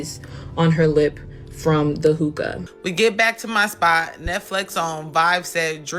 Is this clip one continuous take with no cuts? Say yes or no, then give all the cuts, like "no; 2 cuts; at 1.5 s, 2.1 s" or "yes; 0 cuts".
no; 1 cut; at 2.6 s